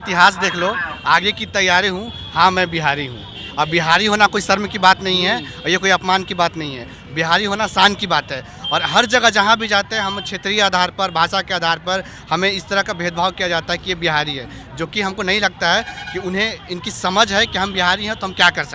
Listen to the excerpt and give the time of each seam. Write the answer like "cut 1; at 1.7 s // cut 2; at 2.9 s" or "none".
none

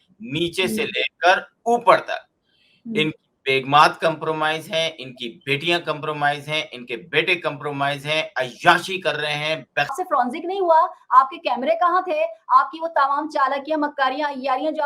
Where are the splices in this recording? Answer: cut 1; at 9.9 s

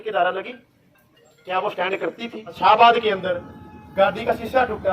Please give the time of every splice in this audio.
cut 1; at 2.6 s

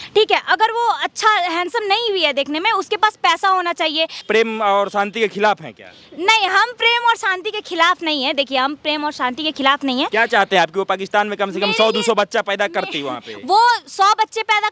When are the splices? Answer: cut 1; at 4.2 s

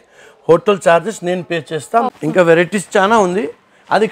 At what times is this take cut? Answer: cut 1; at 2.0 s

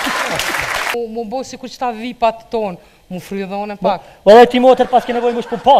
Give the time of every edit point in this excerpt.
cut 1; at 0.9 s

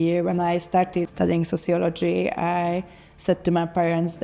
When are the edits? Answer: cut 1; at 1.1 s

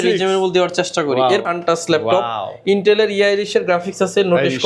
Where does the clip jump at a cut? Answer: cut 1; at 1.4 s

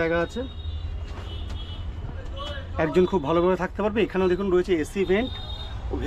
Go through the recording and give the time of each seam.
none

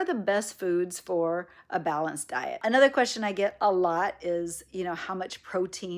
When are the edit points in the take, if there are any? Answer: cut 1; at 2.6 s

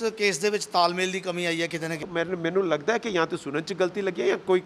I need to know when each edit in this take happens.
cut 1; at 2.0 s

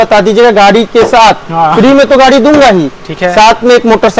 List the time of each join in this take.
none

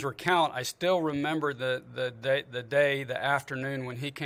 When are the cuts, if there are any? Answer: none

